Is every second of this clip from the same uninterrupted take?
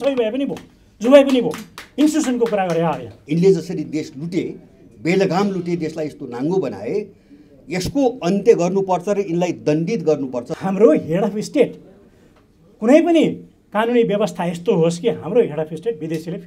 no; 2 cuts; at 3.1 s, 10.5 s

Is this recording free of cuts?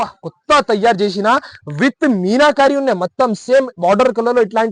yes; 0 cuts

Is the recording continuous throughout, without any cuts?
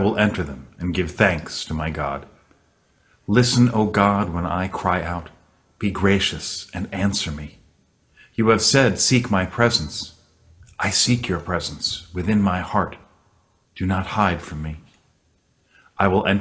yes; 0 cuts

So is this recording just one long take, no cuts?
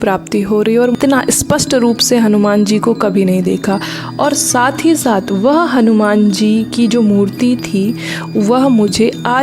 no; 1 cut; at 1.0 s

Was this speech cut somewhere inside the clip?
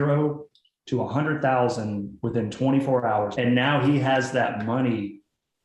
yes; 1 cut; at 3.3 s

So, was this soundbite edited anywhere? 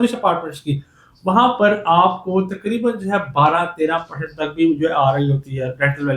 no; 0 cuts

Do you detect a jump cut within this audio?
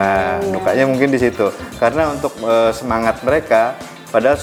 no; 0 cuts

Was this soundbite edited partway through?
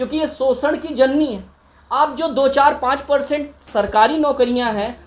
no; 0 cuts

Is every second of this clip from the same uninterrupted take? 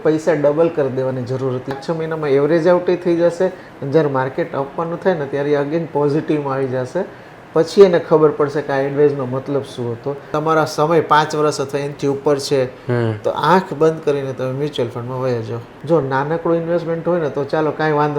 no; 3 cuts; at 1.7 s, 10.3 s, 15.6 s

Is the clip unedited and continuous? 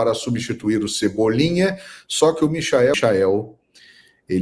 no; 1 cut; at 2.9 s

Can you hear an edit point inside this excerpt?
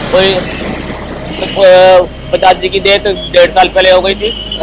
no; 0 cuts

